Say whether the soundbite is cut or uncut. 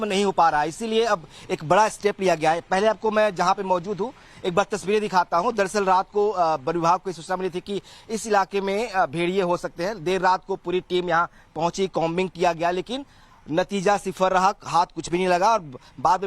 uncut